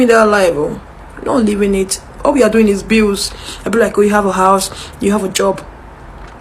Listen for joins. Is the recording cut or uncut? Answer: cut